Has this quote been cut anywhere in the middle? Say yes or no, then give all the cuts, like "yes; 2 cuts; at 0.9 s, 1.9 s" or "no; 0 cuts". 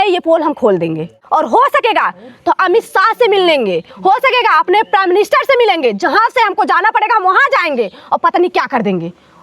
yes; 1 cut; at 1.2 s